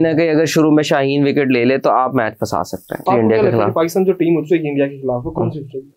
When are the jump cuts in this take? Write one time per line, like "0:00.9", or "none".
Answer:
0:03.0